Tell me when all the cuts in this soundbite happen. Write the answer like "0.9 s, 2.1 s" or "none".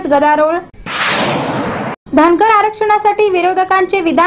none